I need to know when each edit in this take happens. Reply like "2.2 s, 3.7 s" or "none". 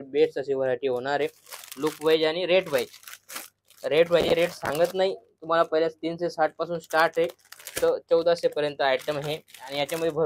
none